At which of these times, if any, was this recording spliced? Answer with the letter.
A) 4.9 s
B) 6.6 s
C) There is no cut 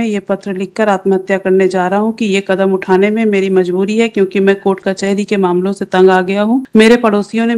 B